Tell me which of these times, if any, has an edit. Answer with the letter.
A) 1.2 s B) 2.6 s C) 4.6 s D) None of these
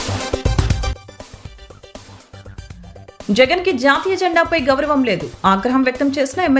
B